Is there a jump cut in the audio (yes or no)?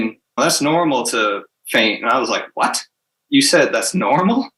no